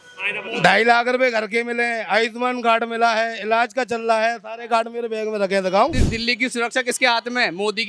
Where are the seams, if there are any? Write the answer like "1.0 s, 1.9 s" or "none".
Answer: 6.0 s